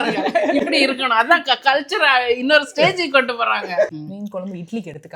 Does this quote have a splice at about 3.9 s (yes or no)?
yes